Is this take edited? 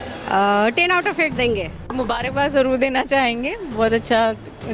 yes; 1 cut; at 1.9 s

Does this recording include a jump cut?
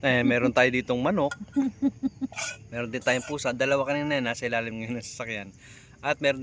no; 0 cuts

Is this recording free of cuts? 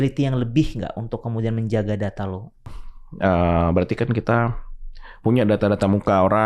no; 1 cut; at 2.8 s

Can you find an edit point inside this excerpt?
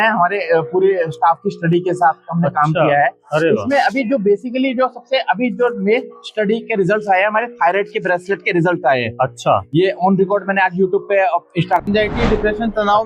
yes; 1 cut; at 11.8 s

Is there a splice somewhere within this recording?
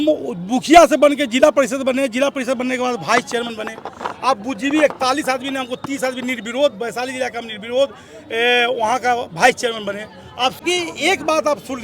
yes; 1 cut; at 10.6 s

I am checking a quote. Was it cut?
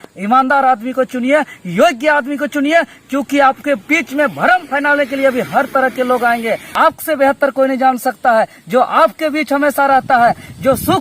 yes; 1 cut; at 6.7 s

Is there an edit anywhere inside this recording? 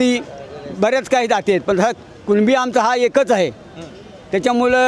no; 0 cuts

